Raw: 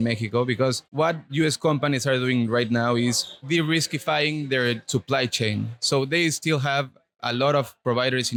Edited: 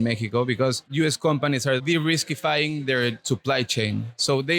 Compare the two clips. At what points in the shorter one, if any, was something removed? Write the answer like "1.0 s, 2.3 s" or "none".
0.8 s, 1.8 s